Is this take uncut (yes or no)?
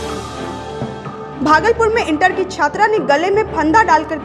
no